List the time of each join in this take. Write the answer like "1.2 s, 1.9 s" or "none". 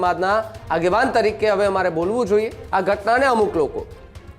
2.6 s

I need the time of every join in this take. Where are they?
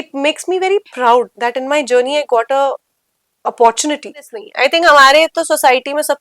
4.4 s

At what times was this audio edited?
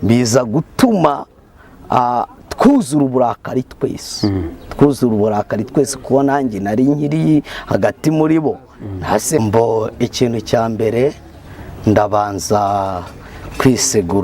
9.4 s

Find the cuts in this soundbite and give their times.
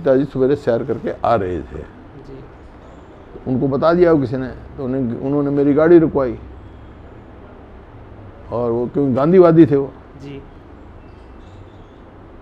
none

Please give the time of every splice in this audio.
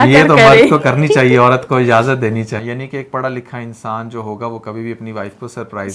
2.6 s

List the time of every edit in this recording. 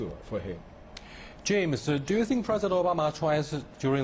1.9 s

